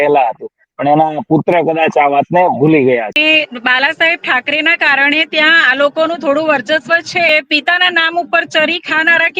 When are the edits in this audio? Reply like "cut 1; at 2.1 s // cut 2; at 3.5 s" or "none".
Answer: cut 1; at 3.2 s // cut 2; at 7.3 s

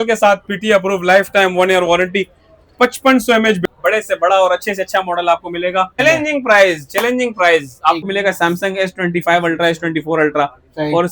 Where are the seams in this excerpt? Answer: cut 1; at 3.6 s // cut 2; at 5.9 s // cut 3; at 8.0 s

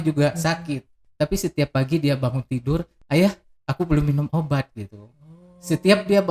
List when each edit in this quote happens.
cut 1; at 1.0 s // cut 2; at 2.9 s

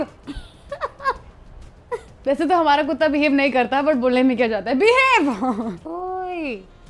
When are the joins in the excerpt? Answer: cut 1; at 5.9 s

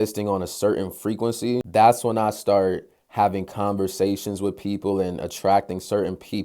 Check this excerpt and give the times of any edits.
cut 1; at 1.7 s

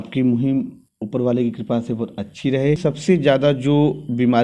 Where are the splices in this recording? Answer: cut 1; at 2.8 s

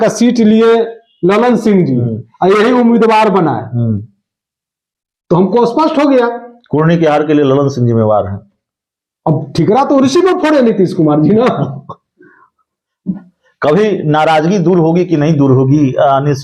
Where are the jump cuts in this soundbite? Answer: none

